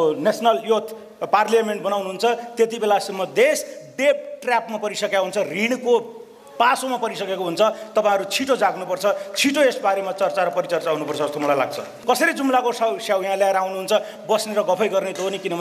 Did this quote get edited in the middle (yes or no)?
yes